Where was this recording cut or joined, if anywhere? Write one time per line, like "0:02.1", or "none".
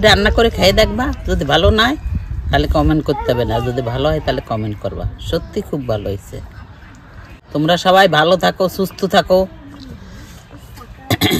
none